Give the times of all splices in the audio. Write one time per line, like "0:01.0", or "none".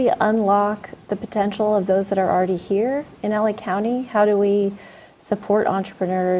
none